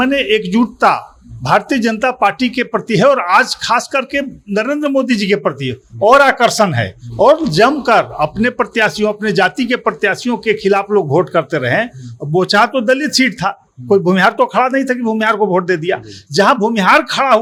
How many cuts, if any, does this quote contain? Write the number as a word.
zero